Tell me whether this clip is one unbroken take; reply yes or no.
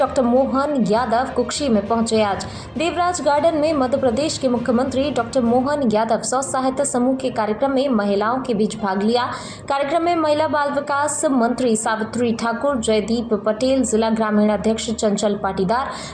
yes